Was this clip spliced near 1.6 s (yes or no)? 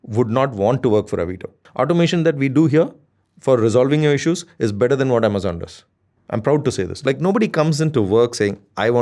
yes